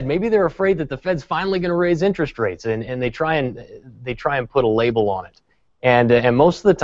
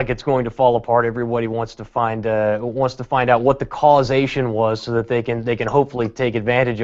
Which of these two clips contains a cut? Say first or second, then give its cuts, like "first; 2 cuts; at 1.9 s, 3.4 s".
second; 1 cut; at 4.8 s